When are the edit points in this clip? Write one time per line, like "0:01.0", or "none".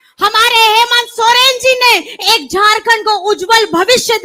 none